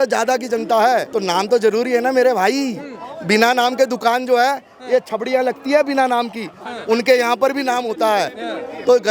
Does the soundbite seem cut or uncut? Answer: cut